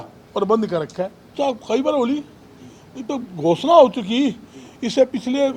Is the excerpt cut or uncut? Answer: cut